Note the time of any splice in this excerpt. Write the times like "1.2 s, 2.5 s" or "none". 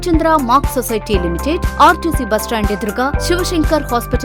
none